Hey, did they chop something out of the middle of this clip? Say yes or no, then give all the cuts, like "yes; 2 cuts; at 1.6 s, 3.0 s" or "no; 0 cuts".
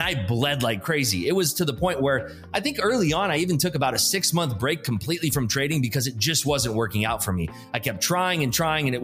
no; 0 cuts